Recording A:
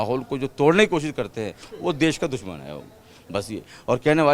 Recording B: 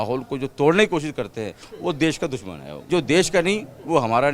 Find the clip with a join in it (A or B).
B